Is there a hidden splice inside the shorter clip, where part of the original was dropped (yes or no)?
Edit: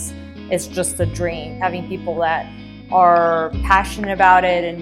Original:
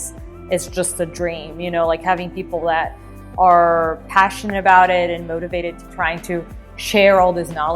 yes